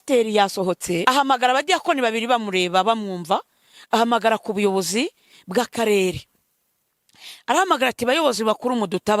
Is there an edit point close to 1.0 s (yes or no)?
yes